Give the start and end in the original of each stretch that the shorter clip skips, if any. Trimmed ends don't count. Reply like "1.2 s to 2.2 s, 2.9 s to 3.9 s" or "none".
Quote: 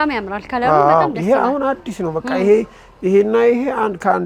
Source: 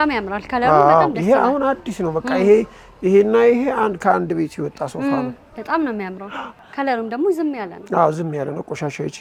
none